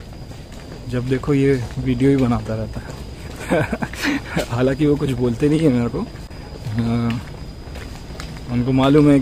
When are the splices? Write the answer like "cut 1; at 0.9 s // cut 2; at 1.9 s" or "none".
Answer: none